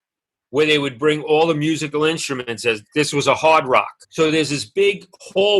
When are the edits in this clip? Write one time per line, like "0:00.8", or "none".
0:04.0